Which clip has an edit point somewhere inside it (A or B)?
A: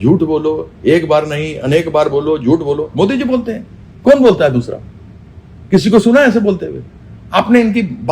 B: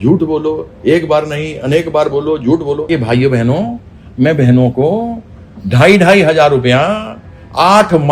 B